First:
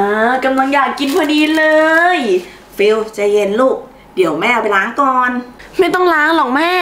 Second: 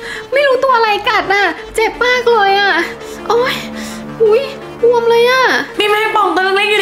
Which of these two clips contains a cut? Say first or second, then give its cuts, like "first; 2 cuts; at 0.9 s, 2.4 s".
second; 1 cut; at 5.7 s